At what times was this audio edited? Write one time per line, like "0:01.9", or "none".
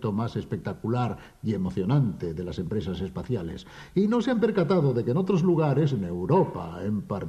0:04.2